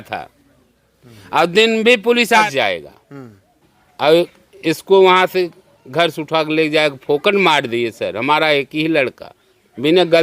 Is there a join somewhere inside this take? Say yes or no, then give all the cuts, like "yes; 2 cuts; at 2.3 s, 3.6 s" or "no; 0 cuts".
yes; 1 cut; at 2.4 s